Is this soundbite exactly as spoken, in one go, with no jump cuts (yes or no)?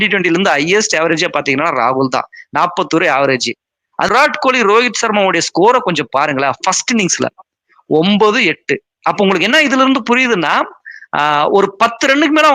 no